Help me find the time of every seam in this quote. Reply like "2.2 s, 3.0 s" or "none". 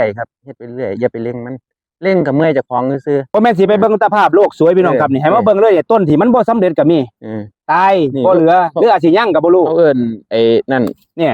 3.6 s